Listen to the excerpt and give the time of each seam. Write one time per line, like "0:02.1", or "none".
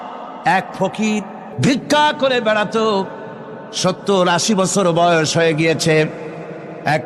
0:01.4